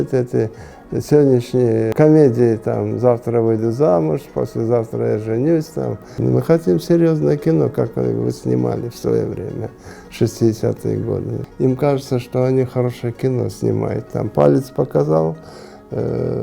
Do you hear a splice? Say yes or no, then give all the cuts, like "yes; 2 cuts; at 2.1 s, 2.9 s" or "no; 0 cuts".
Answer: yes; 3 cuts; at 1.9 s, 6.2 s, 11.4 s